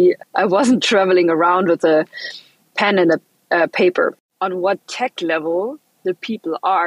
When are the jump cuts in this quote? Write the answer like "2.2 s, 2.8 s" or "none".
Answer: 4.3 s